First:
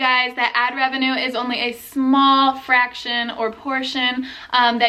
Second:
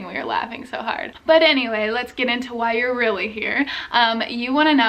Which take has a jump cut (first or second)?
second